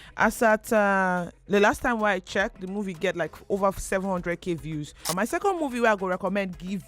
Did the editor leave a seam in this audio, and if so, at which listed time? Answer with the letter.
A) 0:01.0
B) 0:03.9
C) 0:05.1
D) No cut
C